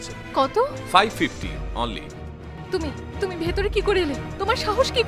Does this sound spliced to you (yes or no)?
yes